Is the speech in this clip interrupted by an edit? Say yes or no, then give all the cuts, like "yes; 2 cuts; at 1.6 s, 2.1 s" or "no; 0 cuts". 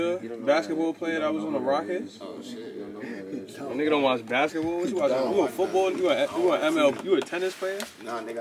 no; 0 cuts